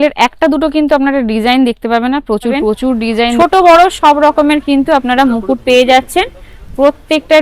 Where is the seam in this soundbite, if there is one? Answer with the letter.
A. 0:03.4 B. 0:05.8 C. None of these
A